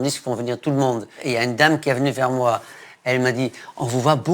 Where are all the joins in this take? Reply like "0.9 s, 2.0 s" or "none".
1.2 s, 2.8 s